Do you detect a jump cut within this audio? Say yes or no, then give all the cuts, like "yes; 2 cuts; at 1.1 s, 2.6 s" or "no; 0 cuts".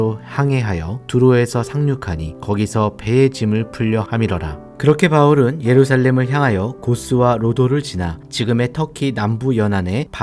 no; 0 cuts